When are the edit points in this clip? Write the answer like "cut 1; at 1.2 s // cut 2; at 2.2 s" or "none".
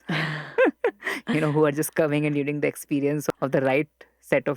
cut 1; at 3.3 s